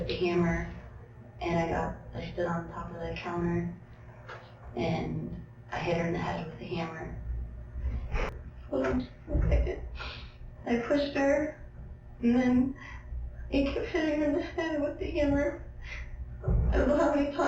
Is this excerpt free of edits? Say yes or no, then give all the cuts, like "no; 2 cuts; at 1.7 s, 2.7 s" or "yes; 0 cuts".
no; 1 cut; at 8.3 s